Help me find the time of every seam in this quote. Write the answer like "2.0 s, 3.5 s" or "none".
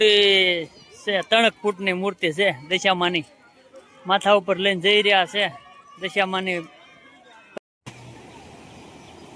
7.6 s

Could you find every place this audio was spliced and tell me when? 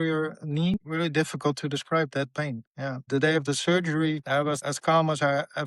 0.7 s, 3.0 s, 4.4 s

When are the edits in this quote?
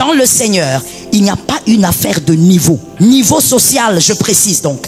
2.9 s

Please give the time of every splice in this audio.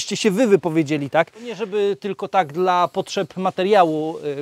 1.7 s

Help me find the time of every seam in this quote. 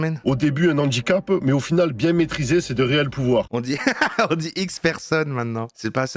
none

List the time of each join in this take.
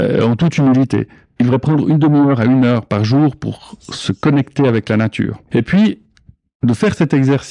1.2 s, 5.4 s

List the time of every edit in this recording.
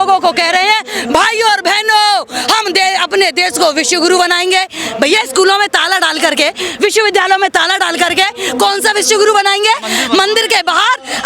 9.8 s

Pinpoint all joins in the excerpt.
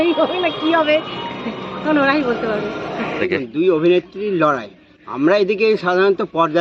3.2 s

